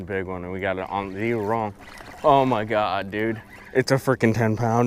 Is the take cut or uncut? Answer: uncut